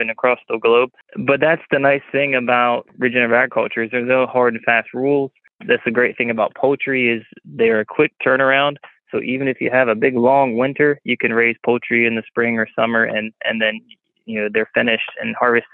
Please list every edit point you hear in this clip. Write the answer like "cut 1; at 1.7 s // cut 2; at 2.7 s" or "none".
cut 1; at 1.0 s // cut 2; at 2.9 s // cut 3; at 5.5 s